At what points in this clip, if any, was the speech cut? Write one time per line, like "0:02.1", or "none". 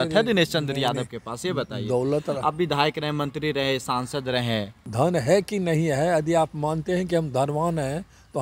0:04.8